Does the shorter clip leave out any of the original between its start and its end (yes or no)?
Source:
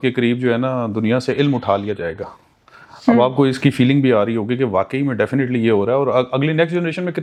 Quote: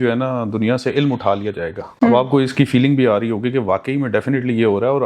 yes